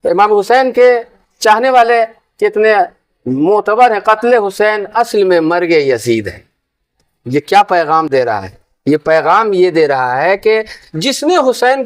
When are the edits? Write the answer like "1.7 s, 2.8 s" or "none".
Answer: none